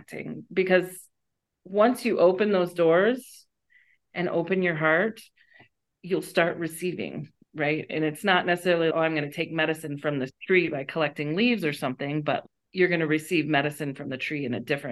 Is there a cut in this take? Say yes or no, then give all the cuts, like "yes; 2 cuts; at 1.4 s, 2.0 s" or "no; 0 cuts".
no; 0 cuts